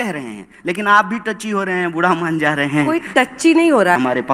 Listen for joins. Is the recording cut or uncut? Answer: uncut